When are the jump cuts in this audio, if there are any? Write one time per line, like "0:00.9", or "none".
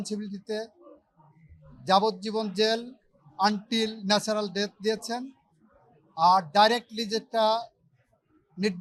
none